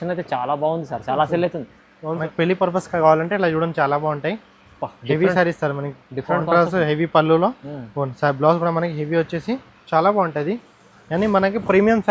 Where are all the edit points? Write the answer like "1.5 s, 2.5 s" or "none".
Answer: 2.2 s